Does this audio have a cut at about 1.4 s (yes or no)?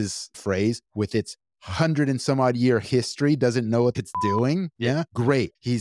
no